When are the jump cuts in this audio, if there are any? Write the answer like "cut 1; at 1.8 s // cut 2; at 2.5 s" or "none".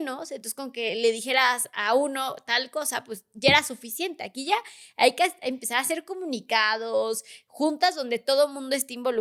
none